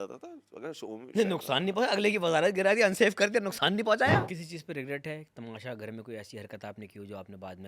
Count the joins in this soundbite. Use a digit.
1